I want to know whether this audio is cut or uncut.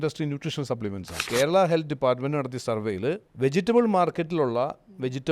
cut